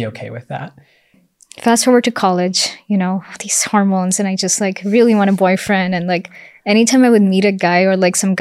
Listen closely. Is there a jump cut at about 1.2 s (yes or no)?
yes